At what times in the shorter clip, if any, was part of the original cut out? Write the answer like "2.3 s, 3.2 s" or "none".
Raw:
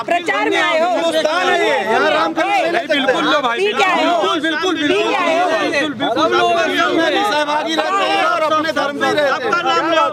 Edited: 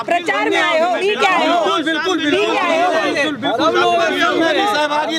1.0 s